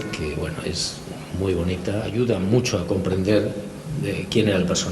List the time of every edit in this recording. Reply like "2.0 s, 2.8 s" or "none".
2.1 s